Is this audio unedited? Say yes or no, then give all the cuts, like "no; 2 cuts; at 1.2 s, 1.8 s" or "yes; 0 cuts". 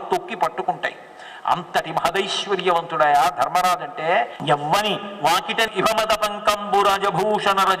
no; 1 cut; at 4.4 s